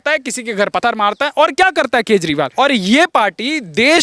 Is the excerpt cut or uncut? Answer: cut